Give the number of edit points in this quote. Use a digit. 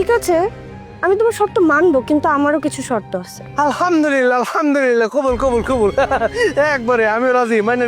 1